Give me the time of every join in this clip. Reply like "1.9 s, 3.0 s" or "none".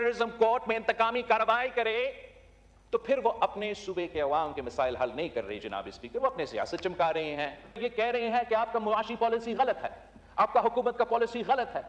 7.8 s